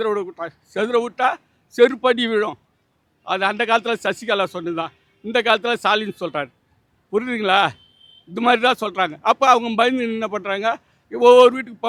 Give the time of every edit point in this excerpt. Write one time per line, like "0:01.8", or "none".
none